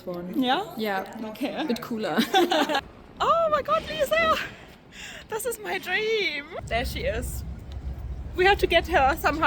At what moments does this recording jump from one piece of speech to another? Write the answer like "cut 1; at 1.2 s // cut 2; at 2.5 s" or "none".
cut 1; at 2.9 s // cut 2; at 6.6 s